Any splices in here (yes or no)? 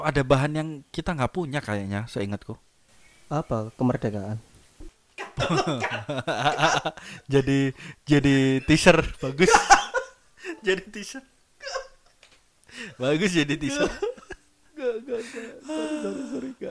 no